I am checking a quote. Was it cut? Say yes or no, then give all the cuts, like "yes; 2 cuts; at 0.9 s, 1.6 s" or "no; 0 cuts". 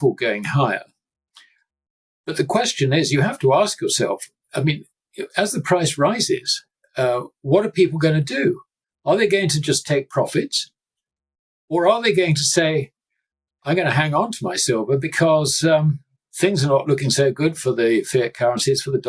no; 0 cuts